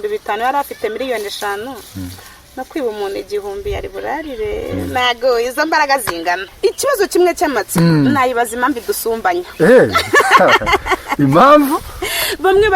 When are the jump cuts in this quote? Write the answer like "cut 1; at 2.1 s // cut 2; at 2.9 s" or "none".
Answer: cut 1; at 6.5 s